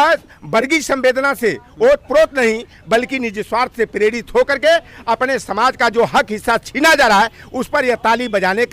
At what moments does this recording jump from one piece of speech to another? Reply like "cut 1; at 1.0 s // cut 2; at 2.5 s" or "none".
none